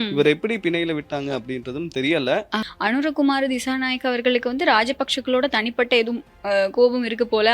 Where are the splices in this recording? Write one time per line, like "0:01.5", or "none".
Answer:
0:02.6